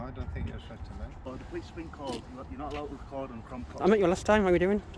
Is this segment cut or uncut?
cut